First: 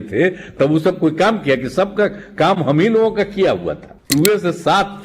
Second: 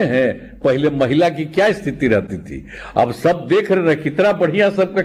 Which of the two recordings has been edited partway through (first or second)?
first